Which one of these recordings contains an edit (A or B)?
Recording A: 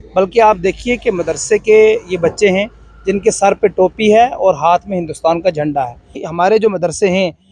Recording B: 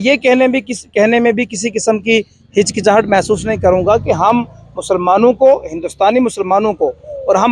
A